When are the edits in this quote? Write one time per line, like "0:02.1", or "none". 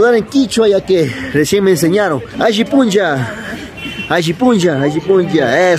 0:02.3